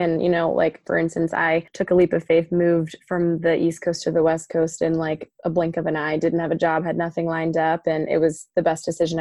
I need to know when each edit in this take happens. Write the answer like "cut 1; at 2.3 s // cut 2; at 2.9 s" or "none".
cut 1; at 1.7 s